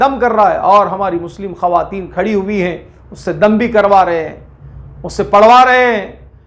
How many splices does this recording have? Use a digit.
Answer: 0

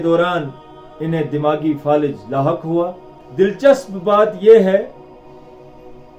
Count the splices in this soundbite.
1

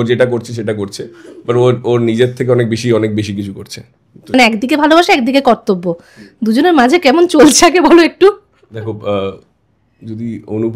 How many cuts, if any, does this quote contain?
1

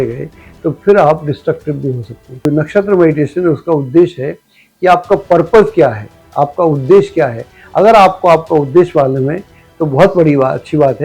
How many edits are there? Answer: 1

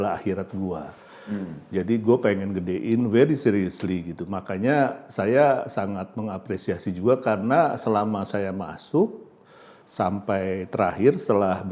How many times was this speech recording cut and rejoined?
0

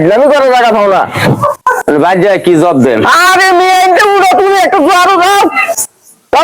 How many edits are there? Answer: 1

